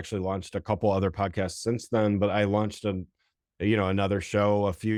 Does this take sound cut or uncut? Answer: uncut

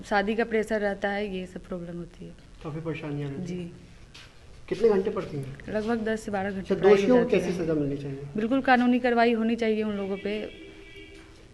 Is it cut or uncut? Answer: uncut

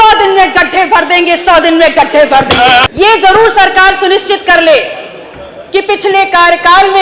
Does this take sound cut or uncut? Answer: cut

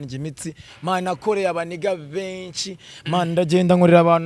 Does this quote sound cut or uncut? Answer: uncut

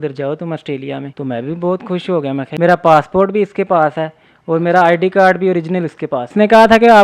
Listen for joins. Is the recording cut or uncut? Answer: cut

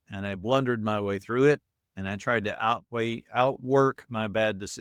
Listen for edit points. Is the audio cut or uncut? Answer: uncut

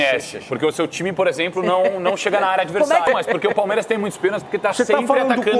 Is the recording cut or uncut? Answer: cut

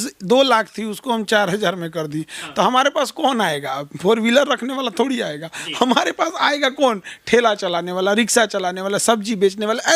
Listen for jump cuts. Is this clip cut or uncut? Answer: uncut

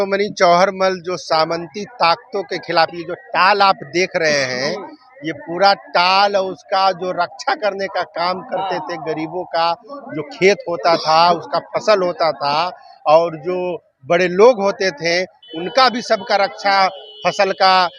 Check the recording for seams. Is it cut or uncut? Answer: uncut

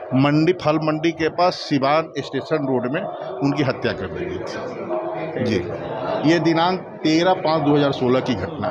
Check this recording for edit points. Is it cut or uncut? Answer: uncut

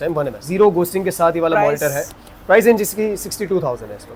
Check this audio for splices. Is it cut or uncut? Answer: uncut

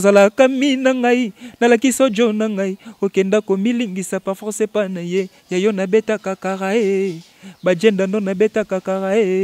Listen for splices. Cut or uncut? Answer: uncut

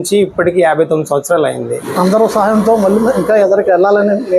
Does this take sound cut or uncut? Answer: cut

